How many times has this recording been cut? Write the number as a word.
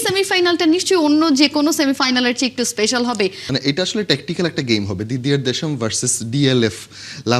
one